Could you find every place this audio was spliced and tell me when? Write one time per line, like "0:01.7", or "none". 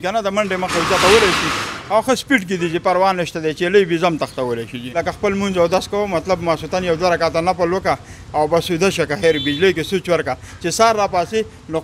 0:04.8